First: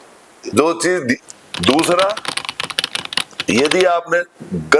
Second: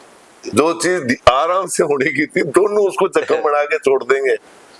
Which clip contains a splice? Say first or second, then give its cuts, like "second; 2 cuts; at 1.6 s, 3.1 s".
first; 1 cut; at 1.2 s